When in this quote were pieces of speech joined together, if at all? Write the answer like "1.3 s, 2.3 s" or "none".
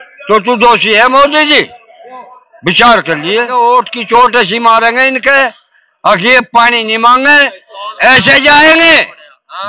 3.5 s